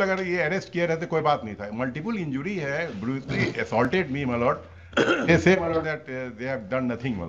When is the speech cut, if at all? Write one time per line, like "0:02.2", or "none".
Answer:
none